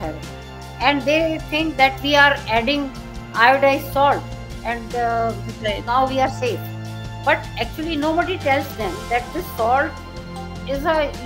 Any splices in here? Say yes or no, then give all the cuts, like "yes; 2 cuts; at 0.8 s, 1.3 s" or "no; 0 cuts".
no; 0 cuts